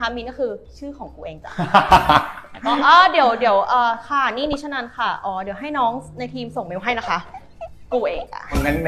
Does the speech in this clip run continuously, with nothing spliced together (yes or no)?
yes